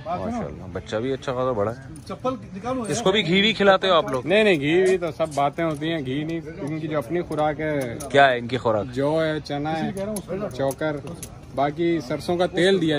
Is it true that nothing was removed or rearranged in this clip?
yes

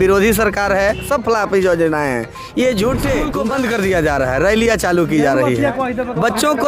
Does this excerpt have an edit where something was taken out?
yes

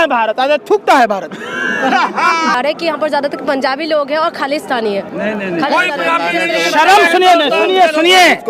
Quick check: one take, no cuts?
no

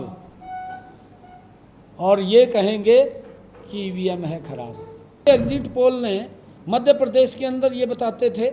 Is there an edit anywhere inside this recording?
yes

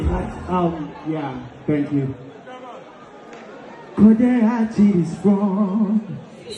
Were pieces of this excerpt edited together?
no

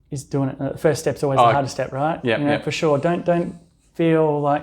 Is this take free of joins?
yes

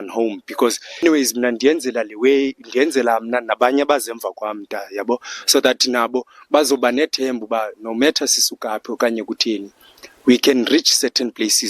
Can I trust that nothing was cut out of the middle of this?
no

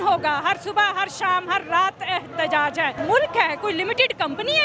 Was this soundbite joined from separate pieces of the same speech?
yes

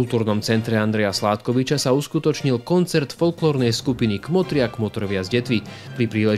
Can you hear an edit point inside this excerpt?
no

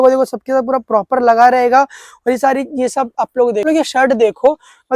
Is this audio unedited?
no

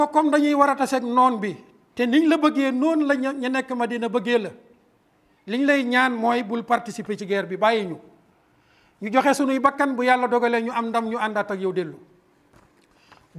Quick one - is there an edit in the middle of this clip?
no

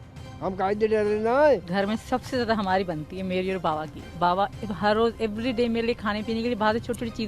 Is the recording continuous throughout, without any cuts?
no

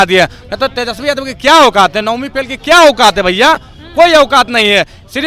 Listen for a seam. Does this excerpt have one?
no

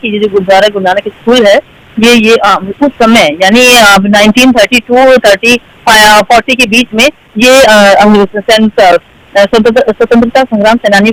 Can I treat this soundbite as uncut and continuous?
yes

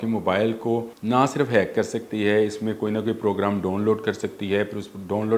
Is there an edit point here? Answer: yes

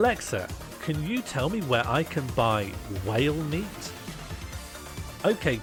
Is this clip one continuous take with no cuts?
yes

